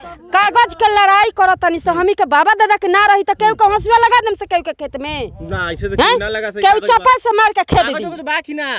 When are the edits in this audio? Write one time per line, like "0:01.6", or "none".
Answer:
none